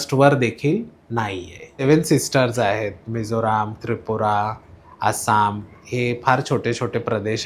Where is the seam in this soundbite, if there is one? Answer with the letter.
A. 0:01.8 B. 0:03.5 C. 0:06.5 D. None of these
A